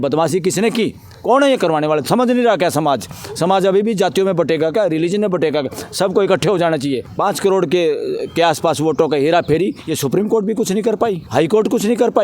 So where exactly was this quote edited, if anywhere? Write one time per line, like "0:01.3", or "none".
0:07.1
0:11.2

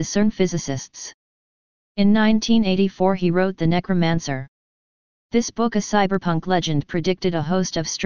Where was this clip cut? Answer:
0:05.9

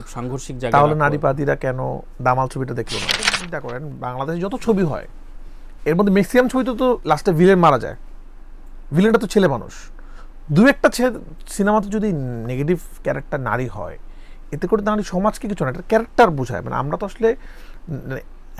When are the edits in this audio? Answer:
0:03.4

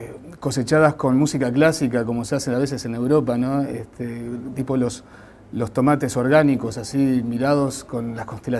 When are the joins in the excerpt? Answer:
0:06.9

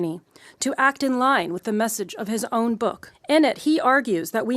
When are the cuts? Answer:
0:03.1

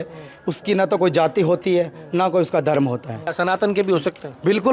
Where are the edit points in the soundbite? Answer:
0:03.3

